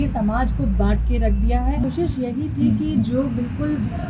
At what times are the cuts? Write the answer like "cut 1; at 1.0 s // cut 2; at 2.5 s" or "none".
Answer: cut 1; at 1.9 s